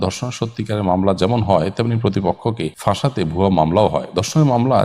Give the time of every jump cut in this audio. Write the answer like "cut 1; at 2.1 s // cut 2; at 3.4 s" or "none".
cut 1; at 2.7 s